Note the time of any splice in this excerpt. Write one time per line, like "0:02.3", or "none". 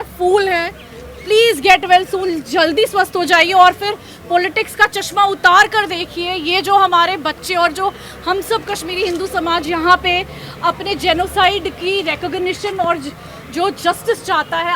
none